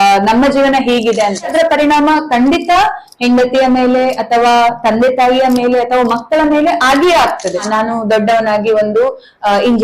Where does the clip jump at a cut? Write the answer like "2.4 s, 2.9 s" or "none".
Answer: 1.5 s, 7.7 s